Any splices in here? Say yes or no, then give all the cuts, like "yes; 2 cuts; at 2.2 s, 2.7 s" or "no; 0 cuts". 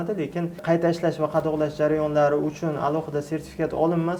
no; 0 cuts